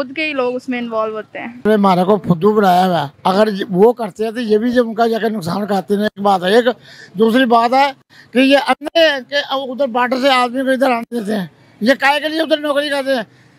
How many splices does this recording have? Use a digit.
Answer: 1